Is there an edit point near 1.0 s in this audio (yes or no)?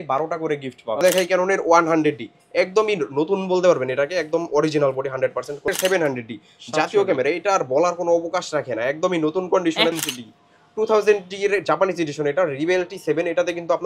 yes